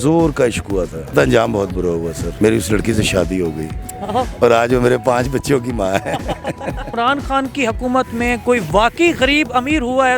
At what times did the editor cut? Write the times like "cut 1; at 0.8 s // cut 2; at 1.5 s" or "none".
cut 1; at 1.1 s // cut 2; at 2.2 s // cut 3; at 6.9 s